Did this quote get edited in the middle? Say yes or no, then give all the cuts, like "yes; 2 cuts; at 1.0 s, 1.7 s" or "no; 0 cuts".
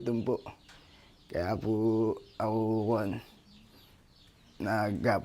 no; 0 cuts